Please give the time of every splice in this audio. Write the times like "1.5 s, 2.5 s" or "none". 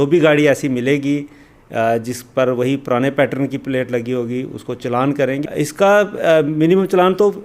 5.4 s